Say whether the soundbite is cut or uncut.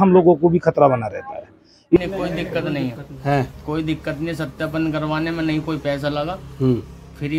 cut